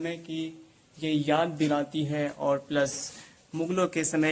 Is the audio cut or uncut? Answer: uncut